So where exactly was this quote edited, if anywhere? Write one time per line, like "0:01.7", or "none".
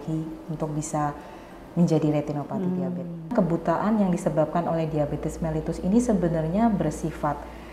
0:03.3